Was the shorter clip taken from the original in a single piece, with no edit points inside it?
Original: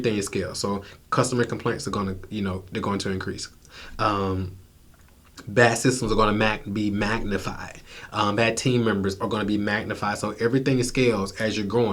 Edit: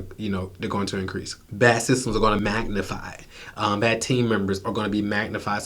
no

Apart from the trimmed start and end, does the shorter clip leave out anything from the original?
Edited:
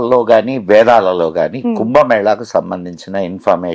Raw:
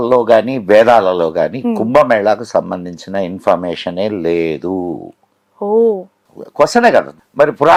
no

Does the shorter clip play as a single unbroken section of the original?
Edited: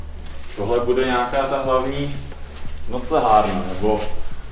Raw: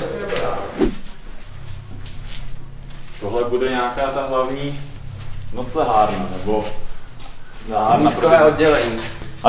yes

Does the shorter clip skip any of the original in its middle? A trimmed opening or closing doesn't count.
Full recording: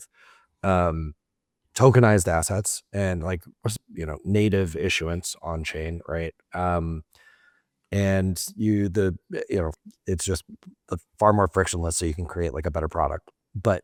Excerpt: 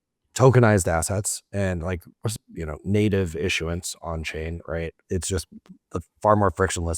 yes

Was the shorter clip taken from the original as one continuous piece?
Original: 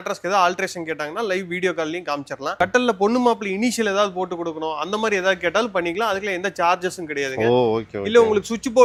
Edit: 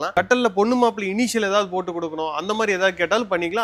yes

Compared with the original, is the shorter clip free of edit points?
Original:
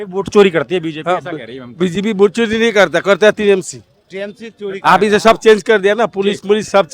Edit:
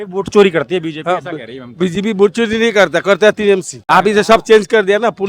no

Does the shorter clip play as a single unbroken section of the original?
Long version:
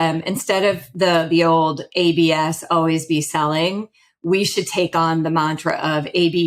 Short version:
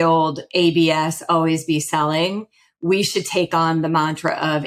yes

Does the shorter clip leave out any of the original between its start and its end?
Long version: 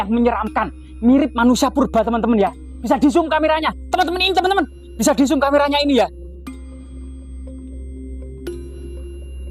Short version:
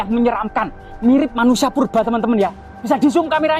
no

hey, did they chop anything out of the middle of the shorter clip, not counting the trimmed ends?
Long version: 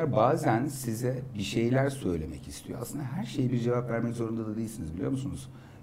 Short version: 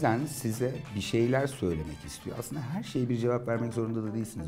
no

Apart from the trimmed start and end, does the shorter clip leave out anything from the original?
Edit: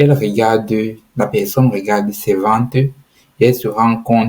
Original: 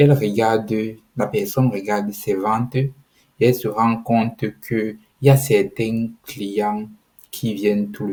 no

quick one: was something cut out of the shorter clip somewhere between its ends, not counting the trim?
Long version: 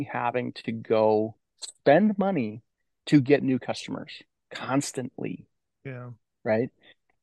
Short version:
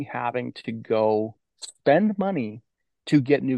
no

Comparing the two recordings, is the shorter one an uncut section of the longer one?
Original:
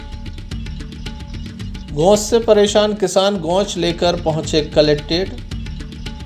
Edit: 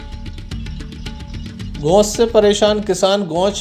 no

